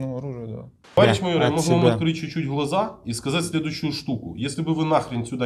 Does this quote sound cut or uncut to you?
cut